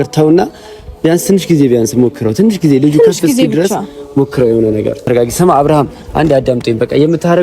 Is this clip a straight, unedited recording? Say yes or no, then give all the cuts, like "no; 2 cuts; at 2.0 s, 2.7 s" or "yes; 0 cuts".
no; 1 cut; at 5.0 s